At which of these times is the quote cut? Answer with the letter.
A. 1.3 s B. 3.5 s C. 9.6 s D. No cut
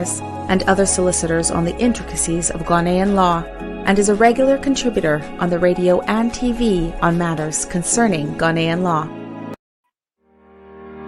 C